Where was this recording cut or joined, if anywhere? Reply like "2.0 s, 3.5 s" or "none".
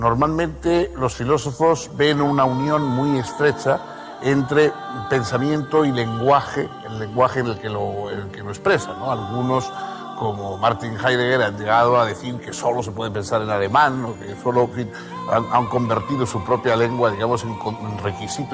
12.6 s